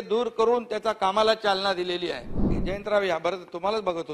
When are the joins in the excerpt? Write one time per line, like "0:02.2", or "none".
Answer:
0:02.5